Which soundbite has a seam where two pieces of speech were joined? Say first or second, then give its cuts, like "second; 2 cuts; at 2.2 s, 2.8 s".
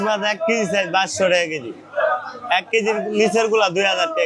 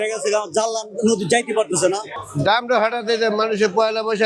second; 1 cut; at 2.2 s